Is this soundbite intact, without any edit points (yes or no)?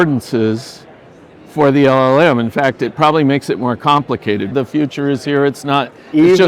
no